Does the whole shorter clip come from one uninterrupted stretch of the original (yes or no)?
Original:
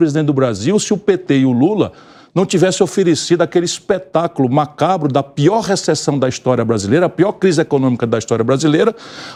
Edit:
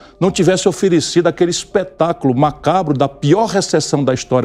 yes